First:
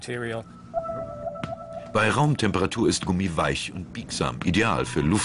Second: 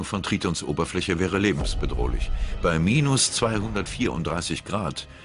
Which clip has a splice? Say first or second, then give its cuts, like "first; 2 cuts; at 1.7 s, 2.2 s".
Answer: first; 1 cut; at 1.4 s